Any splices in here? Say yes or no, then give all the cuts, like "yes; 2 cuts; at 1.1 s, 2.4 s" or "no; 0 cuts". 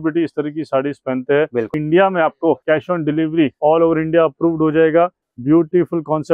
yes; 4 cuts; at 1.8 s, 2.6 s, 3.5 s, 5.3 s